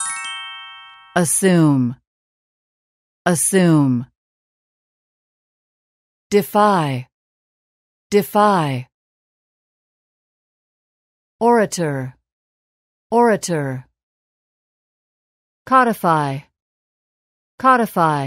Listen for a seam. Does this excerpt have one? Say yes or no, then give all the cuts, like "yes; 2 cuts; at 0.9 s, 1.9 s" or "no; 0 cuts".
yes; 1 cut; at 0.9 s